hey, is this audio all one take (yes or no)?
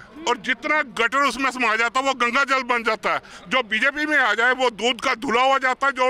no